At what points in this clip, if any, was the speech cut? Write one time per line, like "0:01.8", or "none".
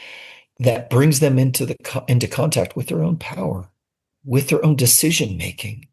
0:04.1